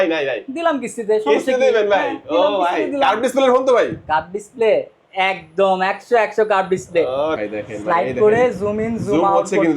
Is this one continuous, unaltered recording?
no; 1 cut; at 7.3 s

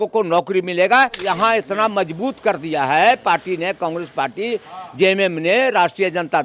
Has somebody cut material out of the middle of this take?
yes; 1 cut; at 1.2 s

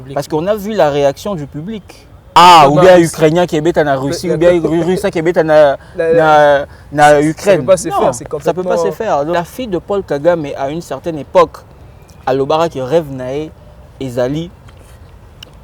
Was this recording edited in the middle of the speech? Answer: yes; 2 cuts; at 2.4 s, 9.3 s

